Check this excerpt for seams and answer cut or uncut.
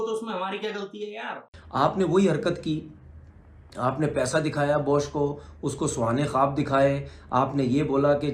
cut